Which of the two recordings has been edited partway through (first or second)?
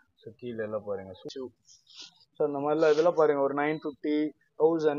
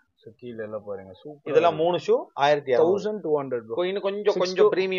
first